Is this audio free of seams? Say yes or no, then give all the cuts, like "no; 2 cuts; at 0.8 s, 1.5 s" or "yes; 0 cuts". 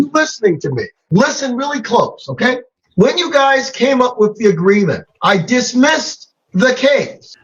yes; 0 cuts